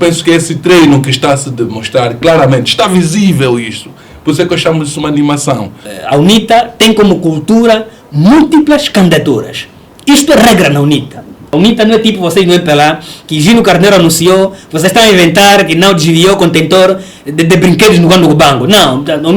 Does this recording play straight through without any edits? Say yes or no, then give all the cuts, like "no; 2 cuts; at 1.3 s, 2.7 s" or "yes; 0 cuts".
no; 2 cuts; at 5.9 s, 11.5 s